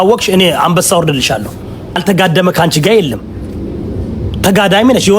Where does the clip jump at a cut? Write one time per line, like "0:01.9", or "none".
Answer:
0:02.0

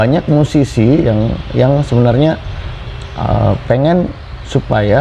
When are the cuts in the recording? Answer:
none

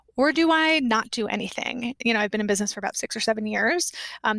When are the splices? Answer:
0:02.0
0:03.0

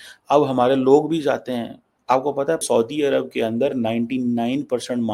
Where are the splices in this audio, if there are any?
0:02.6

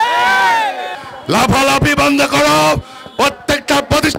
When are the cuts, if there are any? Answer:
0:00.9

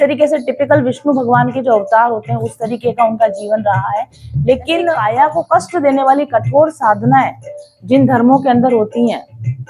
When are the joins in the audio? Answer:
0:05.0

